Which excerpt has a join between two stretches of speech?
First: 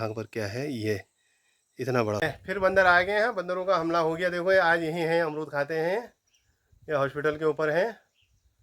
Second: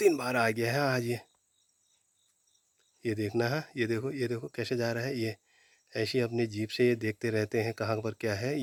first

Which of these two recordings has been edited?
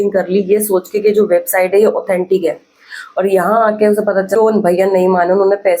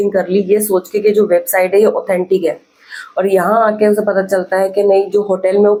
first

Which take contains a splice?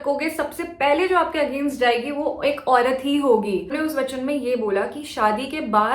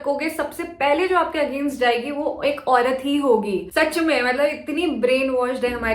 first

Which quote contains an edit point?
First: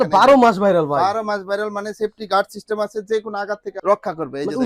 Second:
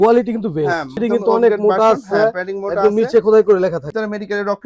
second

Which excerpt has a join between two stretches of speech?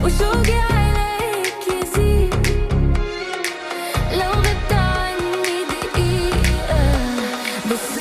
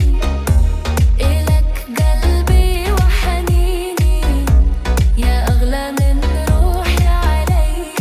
second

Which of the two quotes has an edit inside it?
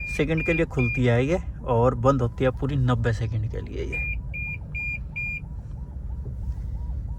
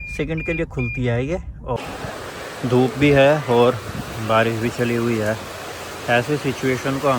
second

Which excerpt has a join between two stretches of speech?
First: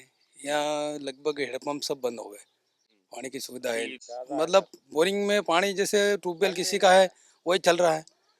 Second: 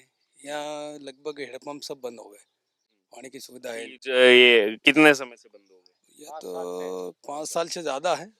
first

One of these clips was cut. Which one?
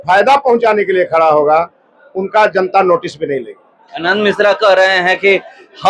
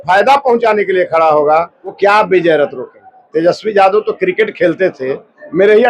second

